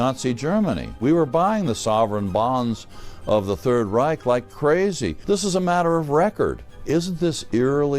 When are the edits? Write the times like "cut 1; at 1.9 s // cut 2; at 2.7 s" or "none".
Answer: cut 1; at 1.0 s // cut 2; at 5.2 s // cut 3; at 6.7 s